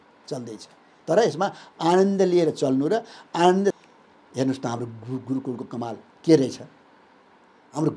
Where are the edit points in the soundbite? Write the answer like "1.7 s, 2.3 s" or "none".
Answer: 3.8 s